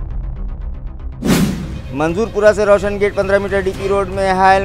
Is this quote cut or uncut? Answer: cut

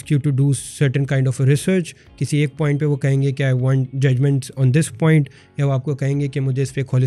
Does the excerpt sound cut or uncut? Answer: uncut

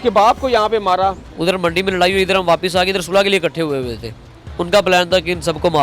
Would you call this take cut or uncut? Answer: cut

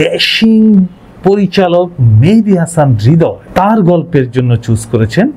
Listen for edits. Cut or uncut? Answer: uncut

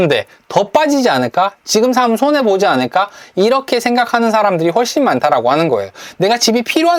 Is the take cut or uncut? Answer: uncut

